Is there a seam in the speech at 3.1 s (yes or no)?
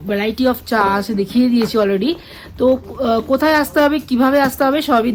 no